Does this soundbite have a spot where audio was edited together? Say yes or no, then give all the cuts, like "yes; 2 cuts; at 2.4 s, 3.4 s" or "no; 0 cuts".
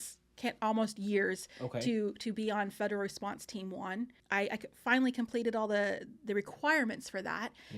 yes; 1 cut; at 4.2 s